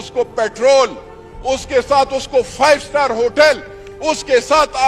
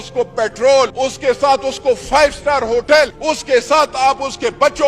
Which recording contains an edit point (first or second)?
second